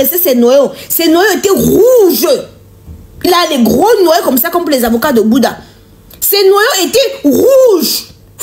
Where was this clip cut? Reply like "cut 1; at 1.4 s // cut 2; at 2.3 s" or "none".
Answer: none